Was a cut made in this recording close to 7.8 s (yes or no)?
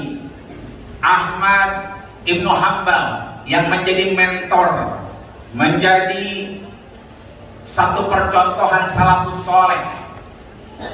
no